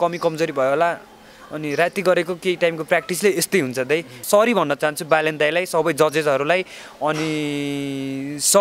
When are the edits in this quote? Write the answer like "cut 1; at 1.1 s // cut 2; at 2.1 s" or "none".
cut 1; at 4.2 s

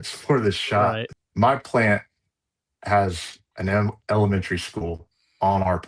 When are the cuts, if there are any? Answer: cut 1; at 1.1 s

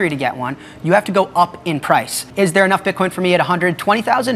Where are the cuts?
cut 1; at 2.2 s

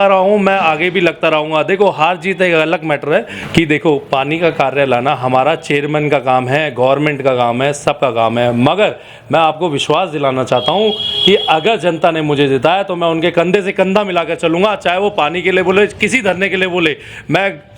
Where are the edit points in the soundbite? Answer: cut 1; at 3.4 s

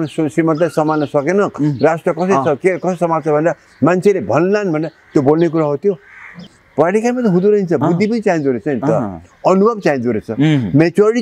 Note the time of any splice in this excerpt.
cut 1; at 6.6 s

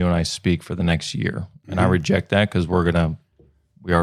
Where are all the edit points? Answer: none

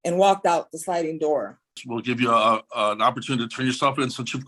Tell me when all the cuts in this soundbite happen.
cut 1; at 1.9 s

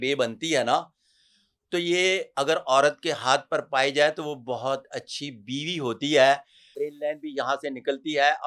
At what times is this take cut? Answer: cut 1; at 6.6 s

